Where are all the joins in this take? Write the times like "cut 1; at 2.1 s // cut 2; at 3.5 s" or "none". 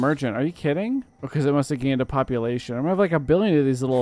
cut 1; at 1.2 s

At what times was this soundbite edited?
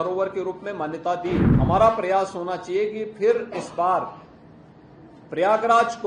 cut 1; at 1.5 s

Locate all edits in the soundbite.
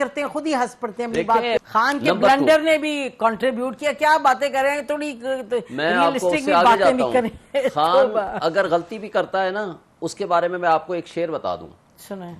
cut 1; at 1.6 s

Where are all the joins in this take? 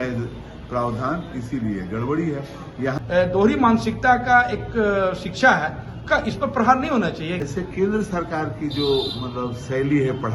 cut 1; at 2.9 s // cut 2; at 7.4 s

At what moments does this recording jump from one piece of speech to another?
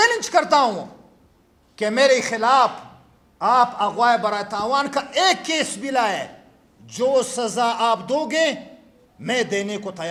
none

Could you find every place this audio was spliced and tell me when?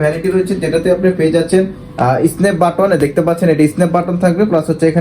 none

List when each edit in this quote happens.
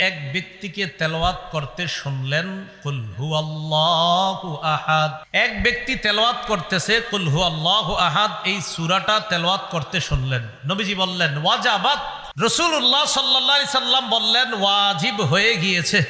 cut 1; at 5.2 s // cut 2; at 12.2 s

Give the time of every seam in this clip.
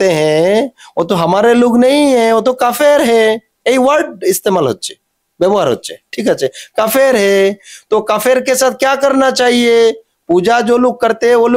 none

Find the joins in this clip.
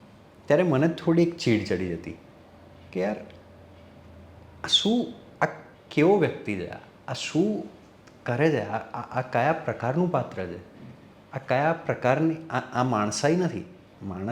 none

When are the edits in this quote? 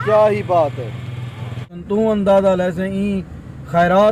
cut 1; at 1.8 s

